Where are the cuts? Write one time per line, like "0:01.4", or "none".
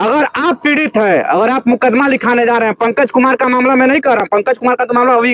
none